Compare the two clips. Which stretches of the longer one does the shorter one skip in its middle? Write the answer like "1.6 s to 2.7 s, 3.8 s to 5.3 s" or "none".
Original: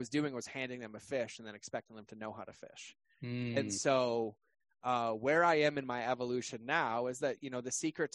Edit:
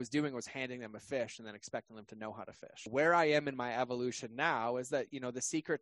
2.9 s to 5.2 s